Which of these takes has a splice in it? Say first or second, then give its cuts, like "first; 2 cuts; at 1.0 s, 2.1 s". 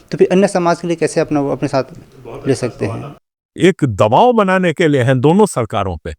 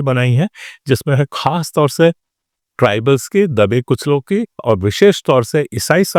first; 1 cut; at 2.9 s